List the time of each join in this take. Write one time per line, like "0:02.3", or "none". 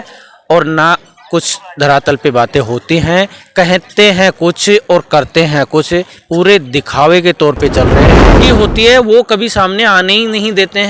0:08.3